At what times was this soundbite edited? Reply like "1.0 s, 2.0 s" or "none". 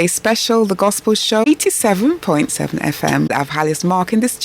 1.4 s, 3.3 s